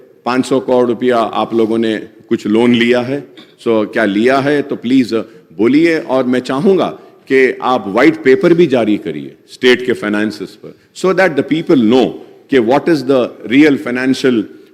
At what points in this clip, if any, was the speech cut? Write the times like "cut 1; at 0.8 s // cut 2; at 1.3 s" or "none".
none